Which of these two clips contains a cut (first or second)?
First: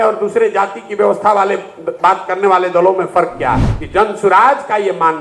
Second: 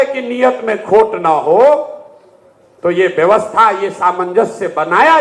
first